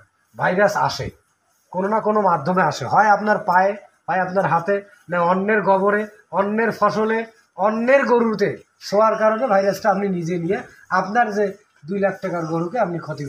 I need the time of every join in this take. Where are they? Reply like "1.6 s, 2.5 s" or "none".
none

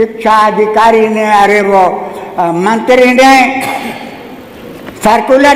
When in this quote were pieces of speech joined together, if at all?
none

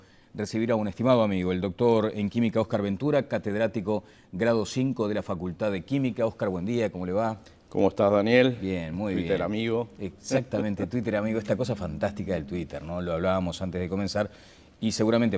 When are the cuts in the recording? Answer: none

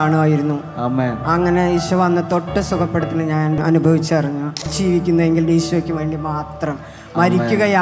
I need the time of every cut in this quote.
3.6 s, 4.7 s

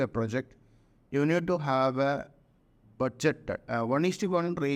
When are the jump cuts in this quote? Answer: 3.6 s

